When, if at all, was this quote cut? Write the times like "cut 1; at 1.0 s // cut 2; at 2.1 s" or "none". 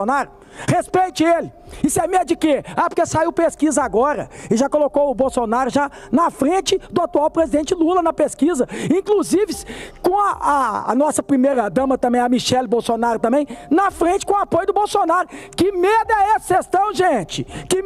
none

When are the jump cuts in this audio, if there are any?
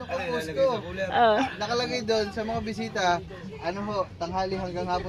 none

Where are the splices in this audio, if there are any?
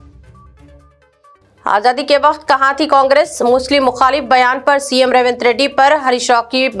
cut 1; at 1.0 s

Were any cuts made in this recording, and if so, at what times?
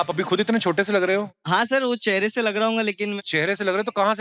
cut 1; at 1.3 s // cut 2; at 3.2 s

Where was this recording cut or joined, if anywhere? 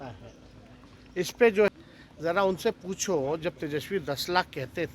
cut 1; at 1.7 s

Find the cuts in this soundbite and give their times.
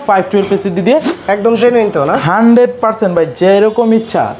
cut 1; at 1.1 s

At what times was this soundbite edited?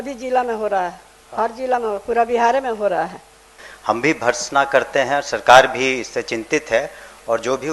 cut 1; at 3.6 s

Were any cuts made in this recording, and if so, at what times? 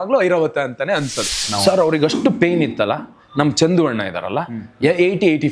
cut 1; at 1.5 s

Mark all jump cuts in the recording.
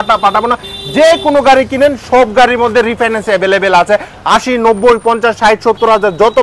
none

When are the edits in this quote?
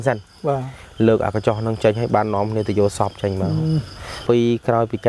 cut 1; at 4.2 s

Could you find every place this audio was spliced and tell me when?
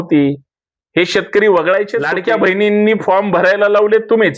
cut 1; at 2.0 s

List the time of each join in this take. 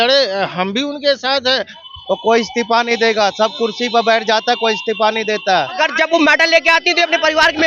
cut 1; at 1.8 s // cut 2; at 5.8 s

